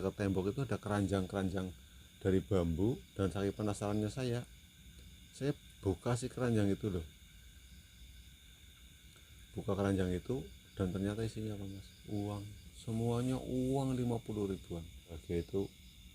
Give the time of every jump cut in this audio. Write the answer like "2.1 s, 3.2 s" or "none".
3.1 s, 15.2 s